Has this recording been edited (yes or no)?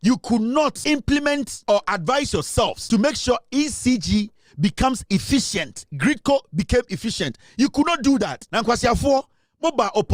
yes